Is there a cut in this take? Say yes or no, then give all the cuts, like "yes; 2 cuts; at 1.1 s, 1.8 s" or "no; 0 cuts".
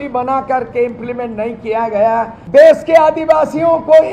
yes; 1 cut; at 2.4 s